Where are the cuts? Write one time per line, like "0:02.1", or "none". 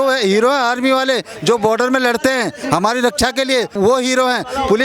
0:03.7